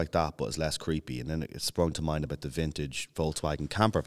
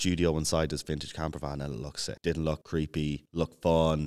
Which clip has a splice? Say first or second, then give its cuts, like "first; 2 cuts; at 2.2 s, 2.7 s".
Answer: second; 2 cuts; at 2.1 s, 2.9 s